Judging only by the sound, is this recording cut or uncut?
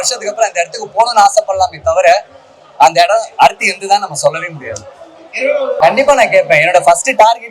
cut